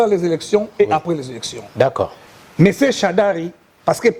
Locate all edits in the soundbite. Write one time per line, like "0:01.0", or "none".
0:02.2